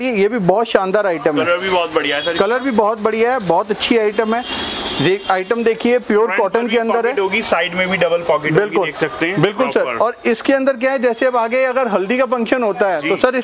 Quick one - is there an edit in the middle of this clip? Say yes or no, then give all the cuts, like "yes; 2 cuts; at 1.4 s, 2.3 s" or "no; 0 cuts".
no; 0 cuts